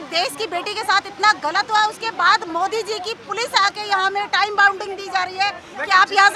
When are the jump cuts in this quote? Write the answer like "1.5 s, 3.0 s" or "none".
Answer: none